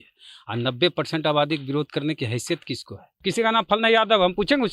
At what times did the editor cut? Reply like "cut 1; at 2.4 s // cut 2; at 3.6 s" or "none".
cut 1; at 3.1 s